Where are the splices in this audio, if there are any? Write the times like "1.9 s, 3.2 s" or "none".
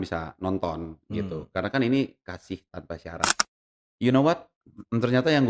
3.5 s